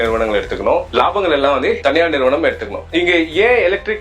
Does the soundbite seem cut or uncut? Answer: cut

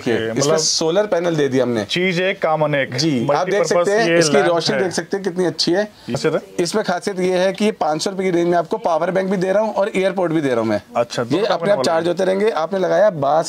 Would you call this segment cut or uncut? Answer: cut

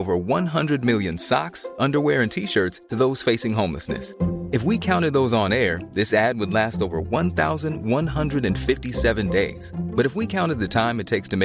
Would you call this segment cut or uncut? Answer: uncut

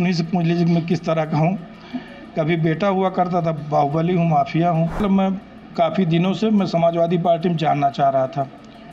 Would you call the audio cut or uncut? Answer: cut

